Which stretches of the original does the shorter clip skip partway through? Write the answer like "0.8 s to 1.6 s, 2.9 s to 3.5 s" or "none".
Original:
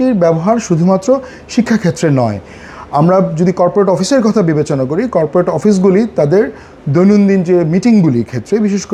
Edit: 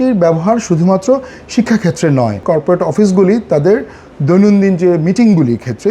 2.4 s to 5.1 s